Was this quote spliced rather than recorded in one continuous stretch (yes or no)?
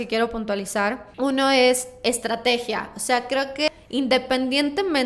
yes